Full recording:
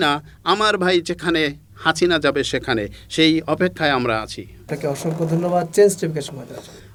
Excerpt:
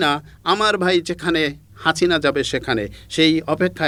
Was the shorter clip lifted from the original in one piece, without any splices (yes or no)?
yes